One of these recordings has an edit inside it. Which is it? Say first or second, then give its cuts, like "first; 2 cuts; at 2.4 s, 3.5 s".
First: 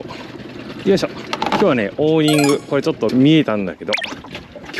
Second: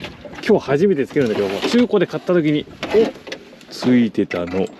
first; 1 cut; at 3.1 s